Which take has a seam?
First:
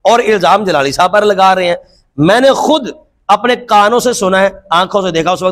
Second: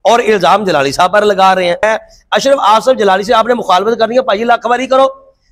second; 1 cut; at 1.8 s

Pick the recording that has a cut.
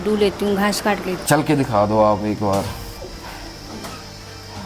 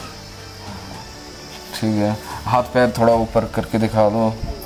first; 2 cuts; at 1.1 s, 2.9 s

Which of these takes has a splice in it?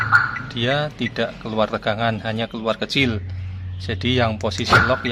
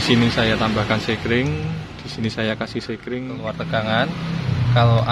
second; 1 cut; at 3.4 s

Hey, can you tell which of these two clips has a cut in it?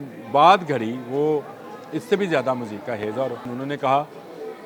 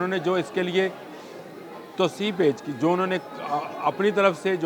first; 1 cut; at 3.5 s

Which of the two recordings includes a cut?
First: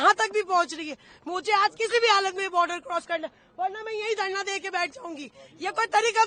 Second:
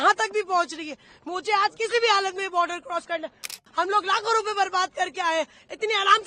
second; 1 cut; at 3.5 s

